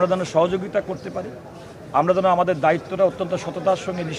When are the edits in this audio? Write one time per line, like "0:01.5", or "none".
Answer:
none